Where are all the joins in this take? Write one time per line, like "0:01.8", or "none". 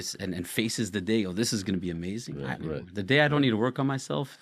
0:02.4